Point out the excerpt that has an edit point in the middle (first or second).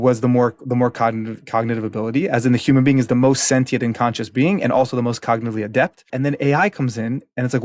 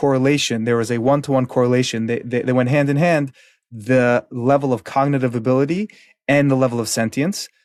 first